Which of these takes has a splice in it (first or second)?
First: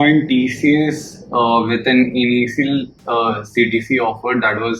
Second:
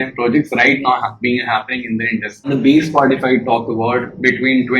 second